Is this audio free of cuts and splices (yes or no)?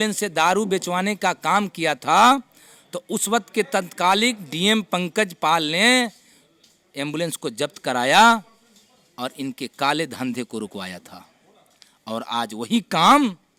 yes